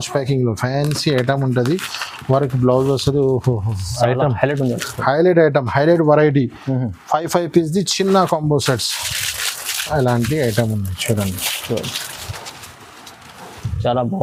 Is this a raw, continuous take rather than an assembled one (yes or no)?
yes